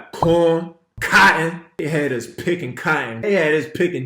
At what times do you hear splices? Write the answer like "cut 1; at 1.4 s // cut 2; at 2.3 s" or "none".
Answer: cut 1; at 1.0 s // cut 2; at 1.7 s